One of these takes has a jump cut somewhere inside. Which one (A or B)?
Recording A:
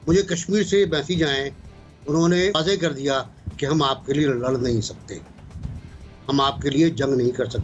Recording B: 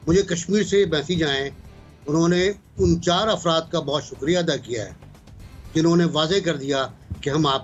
A